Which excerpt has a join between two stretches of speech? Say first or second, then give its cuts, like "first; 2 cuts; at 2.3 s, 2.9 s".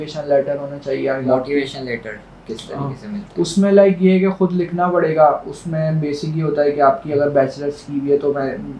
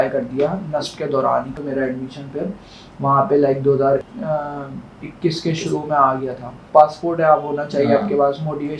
second; 3 cuts; at 1.6 s, 4.1 s, 6.6 s